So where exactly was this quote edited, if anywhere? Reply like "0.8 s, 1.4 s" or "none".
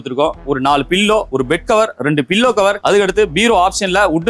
1.3 s, 2.8 s

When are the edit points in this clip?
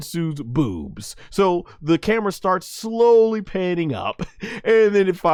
none

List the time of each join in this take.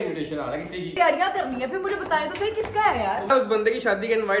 0.9 s, 3.3 s

